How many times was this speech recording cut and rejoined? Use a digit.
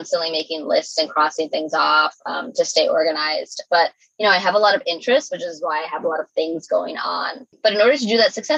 1